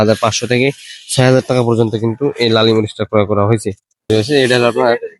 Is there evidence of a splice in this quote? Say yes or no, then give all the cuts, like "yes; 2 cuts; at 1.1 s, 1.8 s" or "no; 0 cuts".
yes; 1 cut; at 4.1 s